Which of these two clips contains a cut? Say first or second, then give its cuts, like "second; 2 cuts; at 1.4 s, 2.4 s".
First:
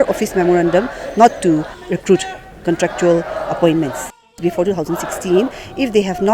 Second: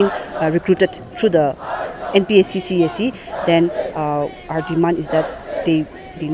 first; 2 cuts; at 1.7 s, 4.4 s